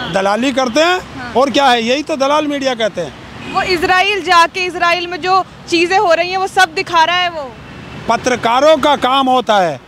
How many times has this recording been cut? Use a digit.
0